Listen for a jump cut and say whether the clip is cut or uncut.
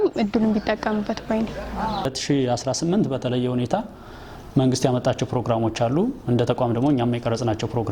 uncut